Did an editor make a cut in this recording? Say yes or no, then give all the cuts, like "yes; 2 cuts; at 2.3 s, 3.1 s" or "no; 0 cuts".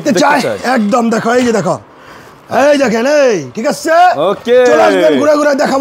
no; 0 cuts